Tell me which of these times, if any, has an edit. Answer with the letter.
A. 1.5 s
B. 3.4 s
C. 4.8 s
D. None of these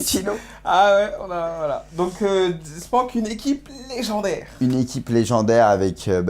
B